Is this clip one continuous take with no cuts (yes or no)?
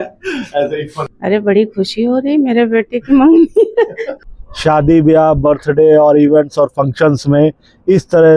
no